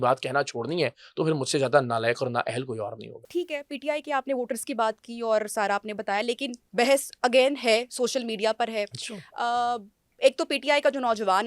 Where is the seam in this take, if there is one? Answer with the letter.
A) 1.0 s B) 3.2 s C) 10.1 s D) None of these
D